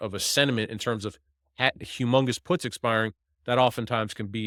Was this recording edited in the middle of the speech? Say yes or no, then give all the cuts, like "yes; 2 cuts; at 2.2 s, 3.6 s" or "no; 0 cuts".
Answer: no; 0 cuts